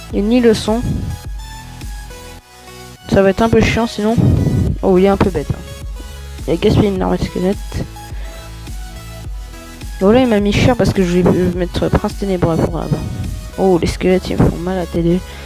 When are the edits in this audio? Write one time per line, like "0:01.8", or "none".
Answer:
0:08.0
0:09.9